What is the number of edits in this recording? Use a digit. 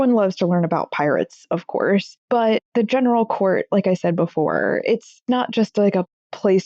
1